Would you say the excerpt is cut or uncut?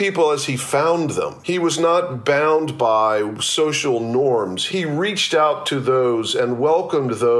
cut